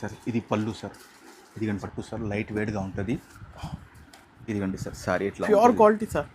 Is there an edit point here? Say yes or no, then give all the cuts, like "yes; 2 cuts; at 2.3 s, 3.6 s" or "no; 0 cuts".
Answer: yes; 1 cut; at 1.9 s